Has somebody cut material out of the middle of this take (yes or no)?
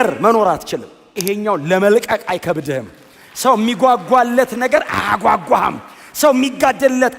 yes